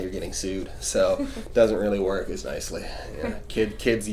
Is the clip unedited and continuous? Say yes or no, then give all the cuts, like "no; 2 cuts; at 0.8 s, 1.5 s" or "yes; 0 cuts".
yes; 0 cuts